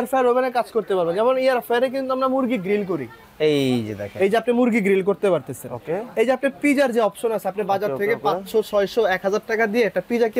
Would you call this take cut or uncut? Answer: uncut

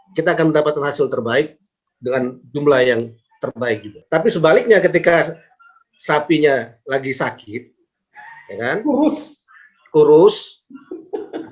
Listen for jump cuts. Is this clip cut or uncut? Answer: cut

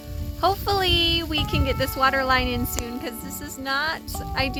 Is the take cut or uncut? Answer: uncut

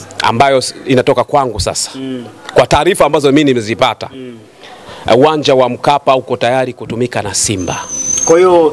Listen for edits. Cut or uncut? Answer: uncut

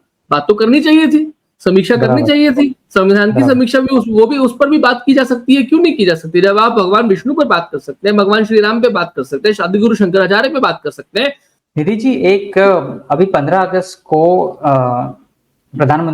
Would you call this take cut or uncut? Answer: cut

